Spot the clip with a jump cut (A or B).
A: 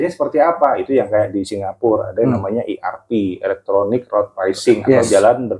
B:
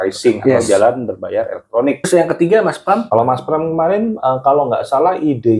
B